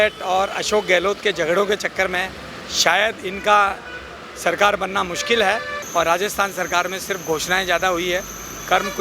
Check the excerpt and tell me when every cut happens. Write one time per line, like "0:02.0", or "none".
0:05.8

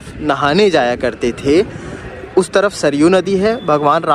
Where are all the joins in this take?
none

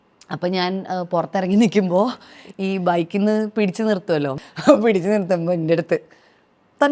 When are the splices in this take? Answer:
0:04.3

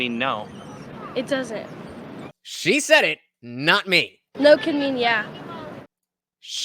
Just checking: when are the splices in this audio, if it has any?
0:02.2
0:05.8

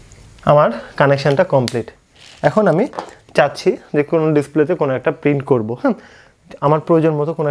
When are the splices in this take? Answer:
none

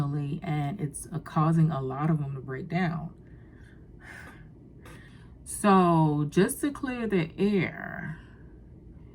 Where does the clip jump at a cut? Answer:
0:05.1

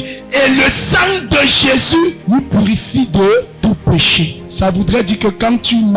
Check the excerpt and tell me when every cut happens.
0:02.2
0:03.5
0:04.4

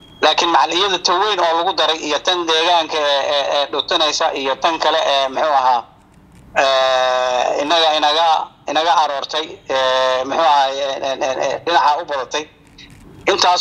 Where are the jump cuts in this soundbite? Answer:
none

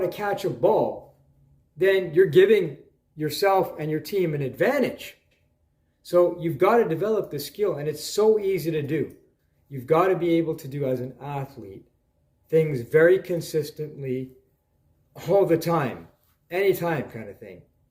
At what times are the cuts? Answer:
none

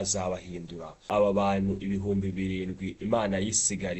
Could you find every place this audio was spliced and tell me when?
0:01.1

